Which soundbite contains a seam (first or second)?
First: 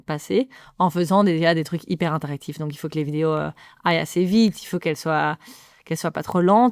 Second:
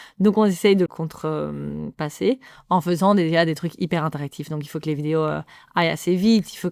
second